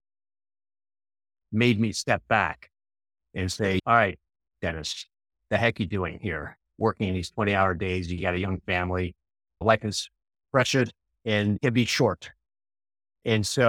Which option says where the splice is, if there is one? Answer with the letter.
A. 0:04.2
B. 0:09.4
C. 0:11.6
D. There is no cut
C